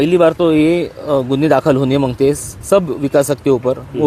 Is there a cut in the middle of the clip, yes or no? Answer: no